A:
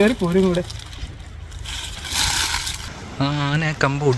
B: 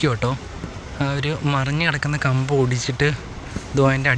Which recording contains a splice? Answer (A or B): A